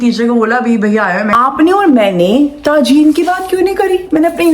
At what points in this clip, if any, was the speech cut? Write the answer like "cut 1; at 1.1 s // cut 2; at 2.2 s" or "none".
cut 1; at 1.3 s